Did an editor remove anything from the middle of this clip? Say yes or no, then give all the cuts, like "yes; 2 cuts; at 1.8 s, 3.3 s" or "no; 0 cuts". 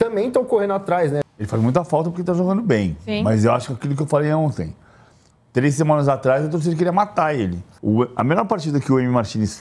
yes; 2 cuts; at 1.2 s, 7.7 s